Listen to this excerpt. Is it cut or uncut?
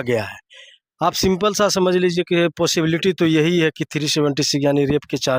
uncut